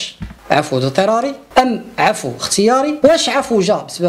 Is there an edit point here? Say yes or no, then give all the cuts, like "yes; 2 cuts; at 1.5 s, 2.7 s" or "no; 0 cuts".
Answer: yes; 1 cut; at 2.9 s